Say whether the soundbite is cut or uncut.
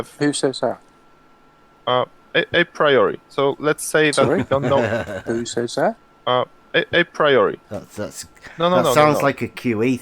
cut